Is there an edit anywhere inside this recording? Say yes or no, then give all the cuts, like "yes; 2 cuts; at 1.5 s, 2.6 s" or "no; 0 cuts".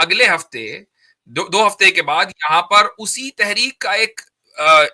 no; 0 cuts